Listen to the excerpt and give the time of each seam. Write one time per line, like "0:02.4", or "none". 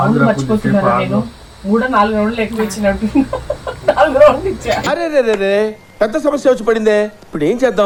none